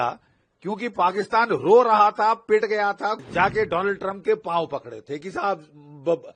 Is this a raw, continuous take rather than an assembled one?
no; 1 cut; at 3.2 s

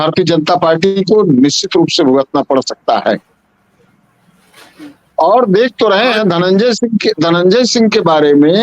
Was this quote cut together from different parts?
no; 0 cuts

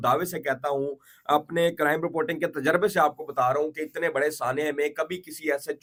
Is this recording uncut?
yes; 0 cuts

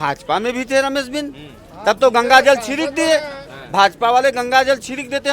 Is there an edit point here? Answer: no; 0 cuts

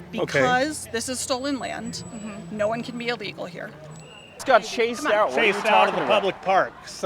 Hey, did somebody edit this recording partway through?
yes; 1 cut; at 4.4 s

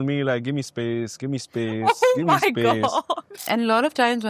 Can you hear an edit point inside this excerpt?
yes; 1 cut; at 3.4 s

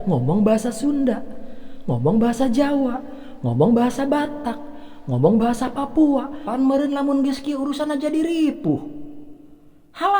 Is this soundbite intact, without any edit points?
no; 1 cut; at 6.4 s

